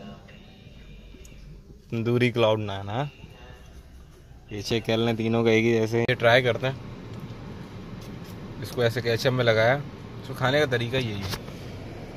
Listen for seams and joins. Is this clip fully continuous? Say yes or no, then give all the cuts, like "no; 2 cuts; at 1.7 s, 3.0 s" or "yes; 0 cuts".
no; 1 cut; at 6.1 s